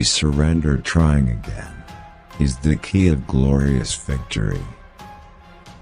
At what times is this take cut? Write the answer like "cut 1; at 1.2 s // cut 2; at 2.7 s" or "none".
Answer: cut 1; at 4.7 s